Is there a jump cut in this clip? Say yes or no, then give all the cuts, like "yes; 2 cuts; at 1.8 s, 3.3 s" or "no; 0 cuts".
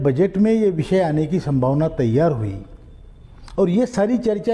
no; 0 cuts